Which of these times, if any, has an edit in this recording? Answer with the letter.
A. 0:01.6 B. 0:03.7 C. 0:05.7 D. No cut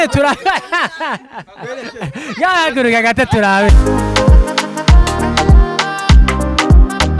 B